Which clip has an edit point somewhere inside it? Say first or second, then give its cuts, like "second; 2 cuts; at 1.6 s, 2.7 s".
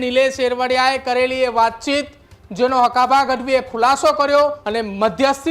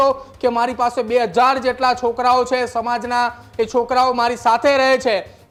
first; 1 cut; at 4.6 s